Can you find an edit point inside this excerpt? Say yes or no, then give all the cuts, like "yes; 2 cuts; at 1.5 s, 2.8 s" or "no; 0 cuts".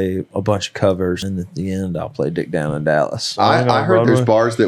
yes; 2 cuts; at 1.2 s, 3.3 s